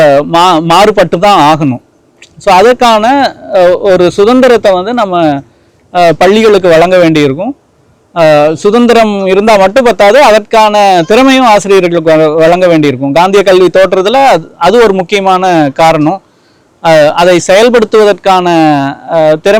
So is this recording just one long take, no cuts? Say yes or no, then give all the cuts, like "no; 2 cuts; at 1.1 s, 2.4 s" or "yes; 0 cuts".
yes; 0 cuts